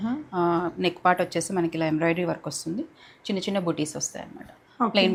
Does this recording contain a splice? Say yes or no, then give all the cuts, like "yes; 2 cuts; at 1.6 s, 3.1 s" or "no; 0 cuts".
no; 0 cuts